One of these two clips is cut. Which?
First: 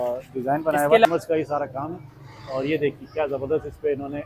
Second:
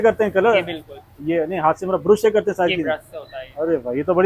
first; 1 cut; at 1.1 s

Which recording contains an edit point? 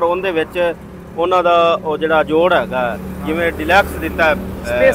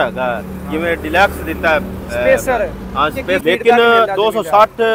second; 1 cut; at 3.4 s

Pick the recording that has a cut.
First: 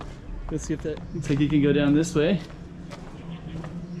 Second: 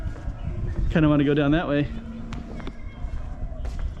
first; 1 cut; at 1.0 s

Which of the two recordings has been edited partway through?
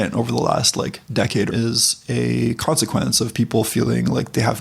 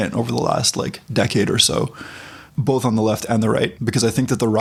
first; 1 cut; at 1.5 s

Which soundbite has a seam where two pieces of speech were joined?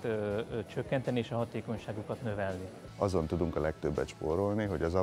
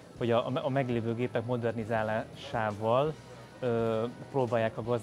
first; 1 cut; at 2.8 s

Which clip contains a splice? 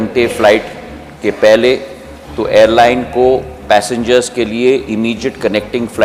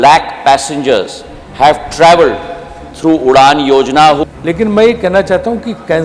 second; 1 cut; at 4.3 s

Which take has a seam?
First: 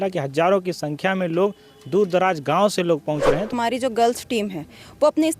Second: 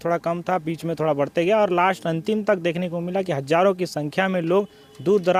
first; 1 cut; at 3.6 s

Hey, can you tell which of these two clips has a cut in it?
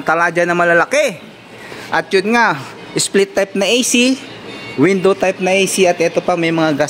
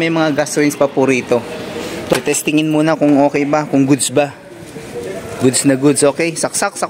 second; 1 cut; at 2.1 s

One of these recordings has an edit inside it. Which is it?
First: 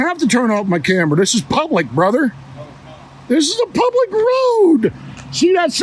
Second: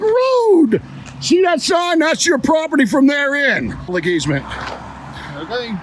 second; 1 cut; at 3.9 s

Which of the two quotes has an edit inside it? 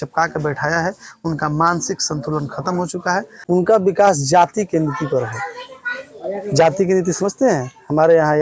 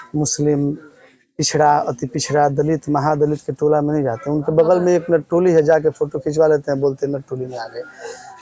first; 1 cut; at 3.3 s

